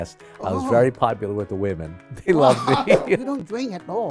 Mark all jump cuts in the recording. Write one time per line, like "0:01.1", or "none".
0:03.2